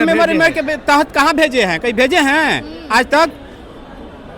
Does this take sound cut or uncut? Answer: uncut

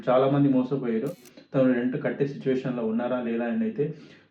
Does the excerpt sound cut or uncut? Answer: cut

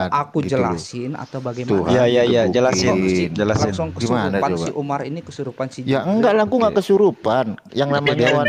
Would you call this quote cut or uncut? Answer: uncut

